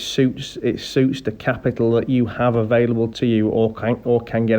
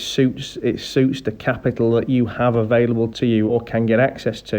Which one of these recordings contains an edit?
second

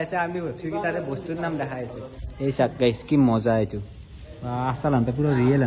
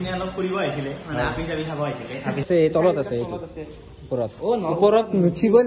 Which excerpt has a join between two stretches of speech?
second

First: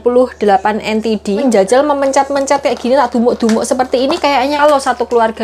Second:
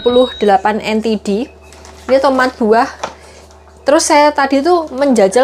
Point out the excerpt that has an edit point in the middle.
first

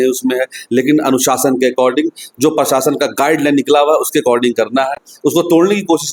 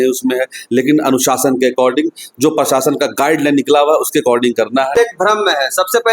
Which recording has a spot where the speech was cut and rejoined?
second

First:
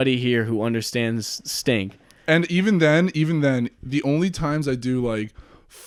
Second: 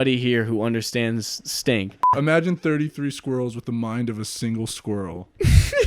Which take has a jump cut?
second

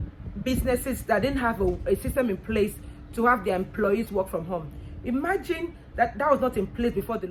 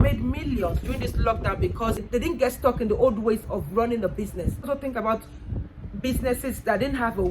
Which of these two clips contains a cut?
second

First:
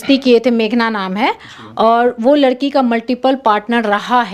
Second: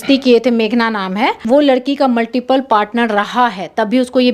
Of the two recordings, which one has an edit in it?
second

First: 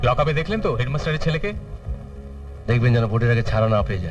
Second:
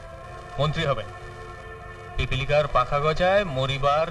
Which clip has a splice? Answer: second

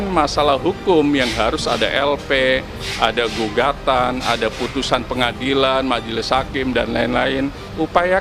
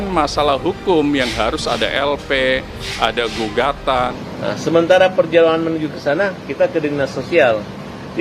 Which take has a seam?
second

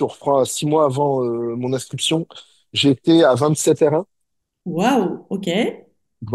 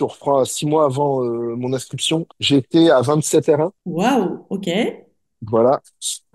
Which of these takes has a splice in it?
second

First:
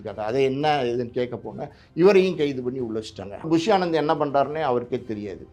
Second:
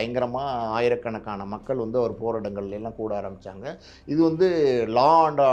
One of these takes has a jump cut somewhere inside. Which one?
first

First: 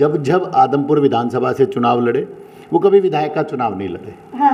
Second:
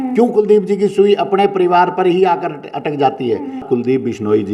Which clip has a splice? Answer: second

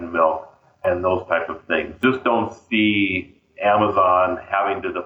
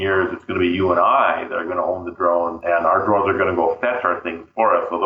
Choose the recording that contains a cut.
first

